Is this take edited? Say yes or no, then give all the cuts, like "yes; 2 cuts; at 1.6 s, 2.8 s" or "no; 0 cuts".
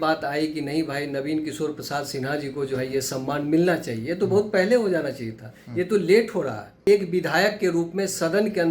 yes; 1 cut; at 6.9 s